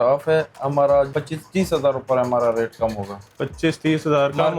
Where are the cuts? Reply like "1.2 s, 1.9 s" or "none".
1.1 s